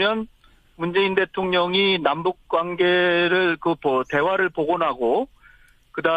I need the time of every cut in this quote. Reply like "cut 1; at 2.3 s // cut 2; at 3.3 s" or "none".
cut 1; at 4.5 s